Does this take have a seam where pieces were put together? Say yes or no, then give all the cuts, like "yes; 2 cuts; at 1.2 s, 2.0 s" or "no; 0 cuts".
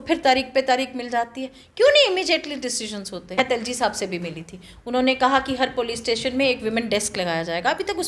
yes; 1 cut; at 3.4 s